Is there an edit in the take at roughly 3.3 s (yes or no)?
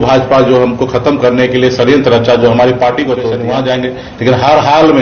yes